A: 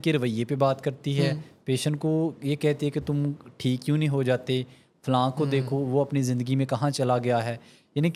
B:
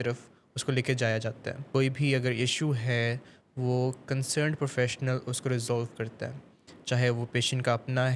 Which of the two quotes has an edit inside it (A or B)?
B